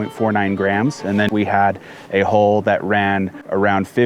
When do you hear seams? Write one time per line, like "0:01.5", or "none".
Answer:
0:01.3